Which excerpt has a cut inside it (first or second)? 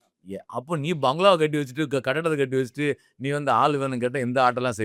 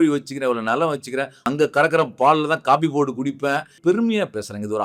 second